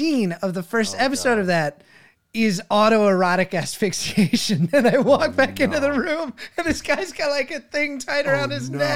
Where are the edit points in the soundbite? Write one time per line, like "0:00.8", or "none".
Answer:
none